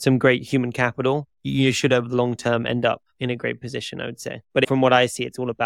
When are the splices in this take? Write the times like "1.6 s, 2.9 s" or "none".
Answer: 3.1 s, 4.4 s